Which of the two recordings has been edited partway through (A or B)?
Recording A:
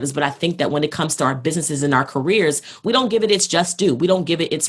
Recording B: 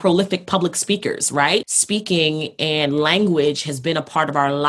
B